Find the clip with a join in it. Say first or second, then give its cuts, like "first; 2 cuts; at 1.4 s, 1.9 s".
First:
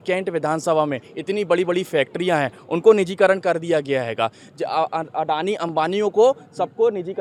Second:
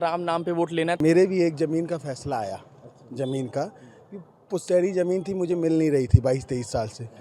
second; 1 cut; at 1.0 s